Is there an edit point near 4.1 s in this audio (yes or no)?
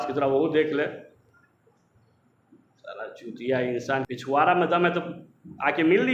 yes